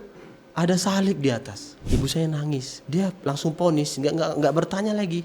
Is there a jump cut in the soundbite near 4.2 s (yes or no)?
no